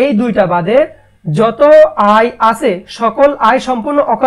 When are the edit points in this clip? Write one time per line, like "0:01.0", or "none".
none